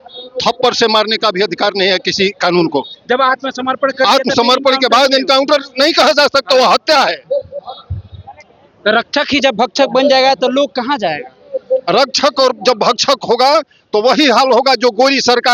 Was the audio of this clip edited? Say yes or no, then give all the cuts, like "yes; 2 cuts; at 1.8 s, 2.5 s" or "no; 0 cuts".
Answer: no; 0 cuts